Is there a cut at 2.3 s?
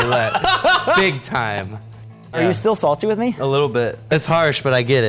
yes; 2 cuts; at 2.3 s, 4.1 s

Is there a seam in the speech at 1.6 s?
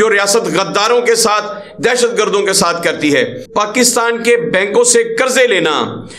no; 1 cut; at 3.4 s

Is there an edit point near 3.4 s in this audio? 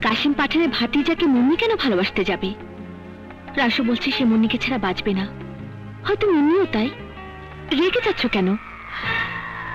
no; 1 cut; at 7.6 s

